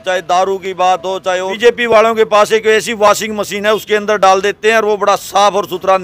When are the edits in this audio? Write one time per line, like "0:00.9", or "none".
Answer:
0:01.5